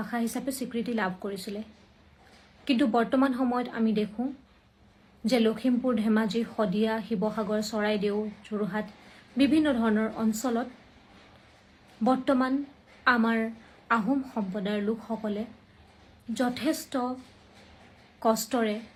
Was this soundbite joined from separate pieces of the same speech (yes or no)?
no